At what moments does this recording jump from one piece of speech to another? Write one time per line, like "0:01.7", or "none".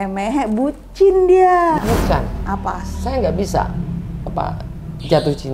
0:01.8